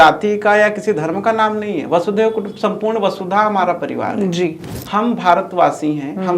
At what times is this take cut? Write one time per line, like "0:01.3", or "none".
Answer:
0:04.7